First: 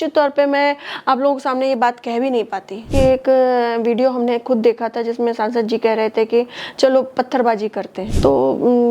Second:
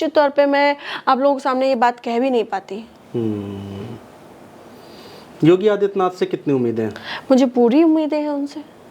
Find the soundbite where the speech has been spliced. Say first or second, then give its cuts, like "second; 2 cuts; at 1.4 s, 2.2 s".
first; 2 cuts; at 2.9 s, 8.0 s